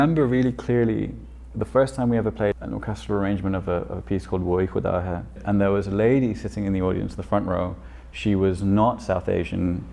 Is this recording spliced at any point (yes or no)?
yes